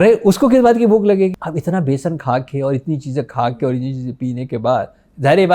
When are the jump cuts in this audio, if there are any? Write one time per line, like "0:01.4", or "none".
0:01.4